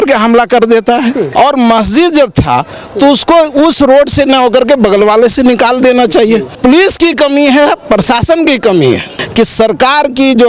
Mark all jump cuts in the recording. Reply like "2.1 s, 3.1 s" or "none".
1.2 s, 6.6 s, 9.2 s